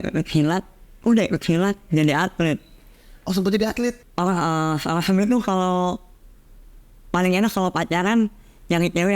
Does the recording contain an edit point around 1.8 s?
no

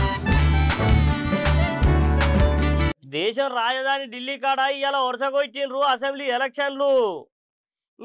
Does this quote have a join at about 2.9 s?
yes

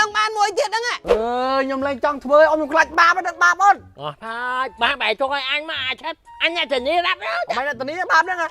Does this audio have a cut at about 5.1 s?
no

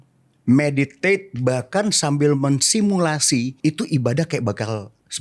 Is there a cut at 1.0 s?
no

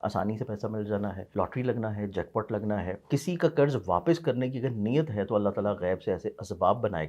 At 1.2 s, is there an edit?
yes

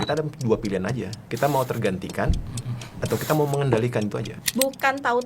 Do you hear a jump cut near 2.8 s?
no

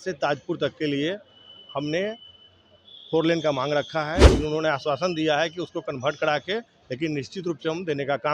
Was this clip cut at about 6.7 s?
no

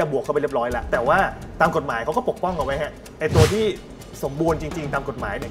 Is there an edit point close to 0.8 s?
yes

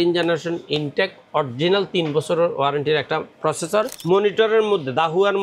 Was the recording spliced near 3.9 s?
yes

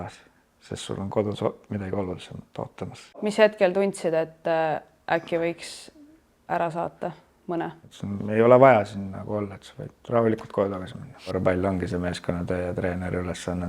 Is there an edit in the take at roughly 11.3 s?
yes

